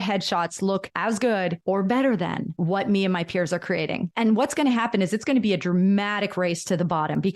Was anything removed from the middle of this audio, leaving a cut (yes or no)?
yes